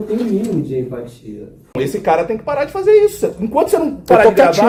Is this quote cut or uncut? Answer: uncut